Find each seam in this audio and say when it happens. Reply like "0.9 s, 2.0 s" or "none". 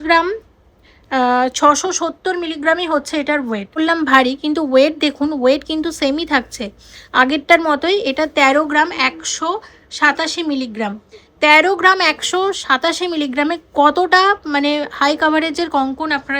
3.8 s